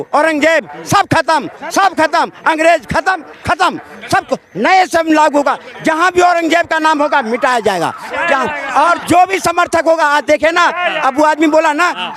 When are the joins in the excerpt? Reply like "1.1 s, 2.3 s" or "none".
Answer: none